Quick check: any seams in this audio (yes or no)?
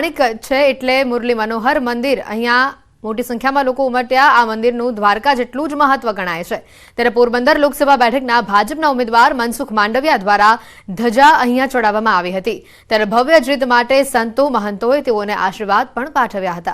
yes